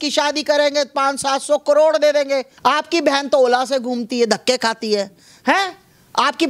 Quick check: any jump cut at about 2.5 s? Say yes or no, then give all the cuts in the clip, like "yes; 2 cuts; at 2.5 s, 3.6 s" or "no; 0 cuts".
yes; 1 cut; at 2.5 s